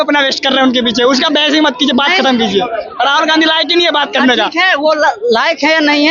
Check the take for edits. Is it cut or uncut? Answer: uncut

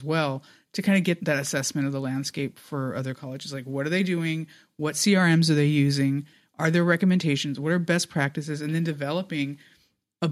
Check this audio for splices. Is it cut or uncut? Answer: uncut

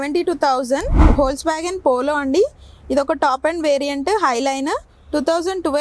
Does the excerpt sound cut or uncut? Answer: cut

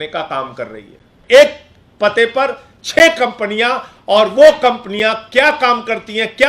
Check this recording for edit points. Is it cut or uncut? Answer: cut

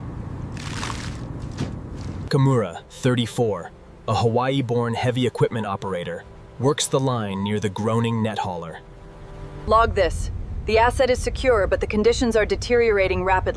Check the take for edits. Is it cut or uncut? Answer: uncut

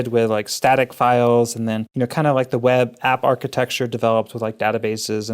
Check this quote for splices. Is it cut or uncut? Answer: cut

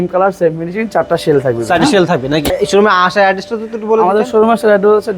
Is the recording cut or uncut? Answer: cut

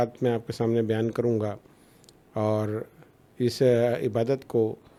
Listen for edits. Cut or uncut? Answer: uncut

